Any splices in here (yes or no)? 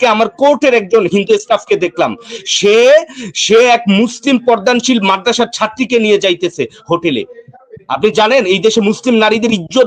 no